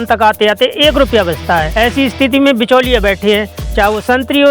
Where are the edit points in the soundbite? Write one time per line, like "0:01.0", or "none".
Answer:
0:01.7